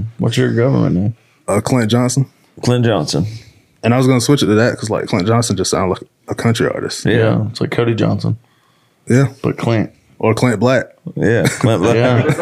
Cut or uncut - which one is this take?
uncut